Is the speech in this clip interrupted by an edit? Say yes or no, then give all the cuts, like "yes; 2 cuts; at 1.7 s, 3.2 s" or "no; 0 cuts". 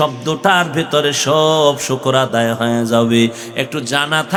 no; 0 cuts